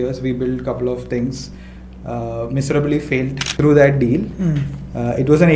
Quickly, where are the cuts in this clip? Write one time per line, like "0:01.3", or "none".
0:03.5